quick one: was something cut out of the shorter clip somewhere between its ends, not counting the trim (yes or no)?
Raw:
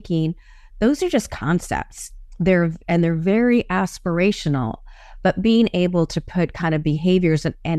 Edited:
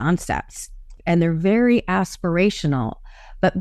yes